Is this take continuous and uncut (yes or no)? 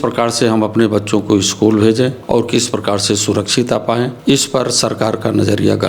no